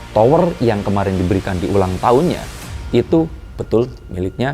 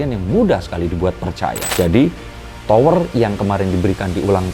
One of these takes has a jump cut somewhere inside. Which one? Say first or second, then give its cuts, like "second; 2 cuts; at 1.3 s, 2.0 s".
second; 1 cut; at 1.6 s